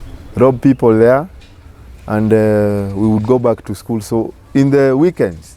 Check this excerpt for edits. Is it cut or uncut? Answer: uncut